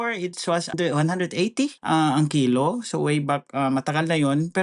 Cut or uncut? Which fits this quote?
cut